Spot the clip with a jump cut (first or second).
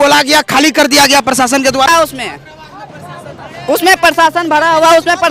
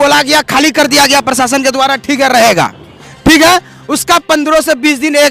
first